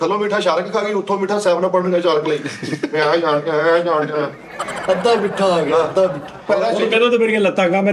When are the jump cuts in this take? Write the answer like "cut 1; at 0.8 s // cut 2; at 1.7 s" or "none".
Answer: none